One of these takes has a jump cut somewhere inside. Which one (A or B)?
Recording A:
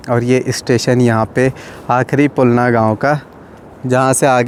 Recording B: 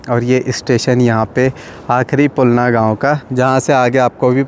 B